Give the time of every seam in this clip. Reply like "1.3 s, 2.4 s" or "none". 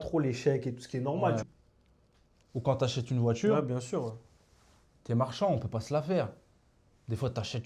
1.4 s